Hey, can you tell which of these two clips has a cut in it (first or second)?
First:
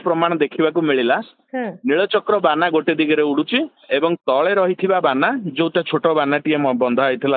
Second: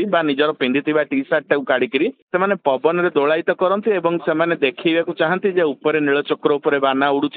second